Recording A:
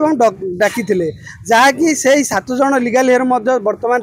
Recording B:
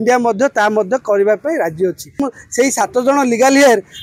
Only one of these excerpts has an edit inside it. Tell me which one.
B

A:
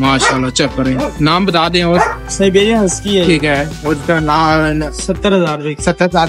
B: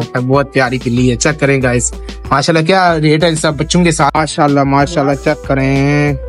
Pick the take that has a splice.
B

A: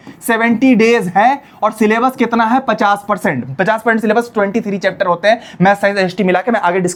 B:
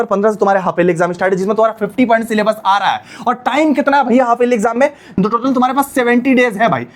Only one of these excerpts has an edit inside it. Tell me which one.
B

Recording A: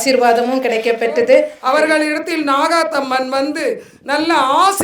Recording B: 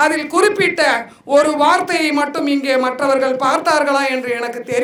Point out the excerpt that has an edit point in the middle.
A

